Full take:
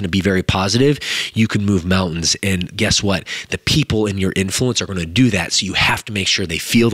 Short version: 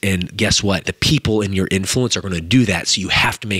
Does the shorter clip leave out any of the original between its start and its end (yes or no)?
yes